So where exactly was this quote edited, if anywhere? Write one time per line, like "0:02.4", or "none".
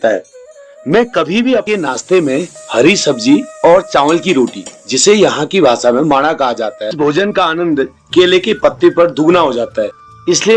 0:01.6
0:06.9